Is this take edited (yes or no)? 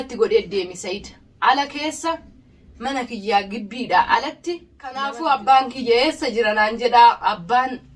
yes